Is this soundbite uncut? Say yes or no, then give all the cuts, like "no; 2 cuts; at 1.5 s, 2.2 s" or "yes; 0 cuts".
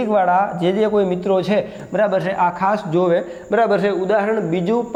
yes; 0 cuts